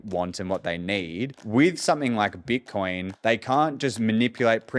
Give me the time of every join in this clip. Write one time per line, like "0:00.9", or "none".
0:01.4
0:03.1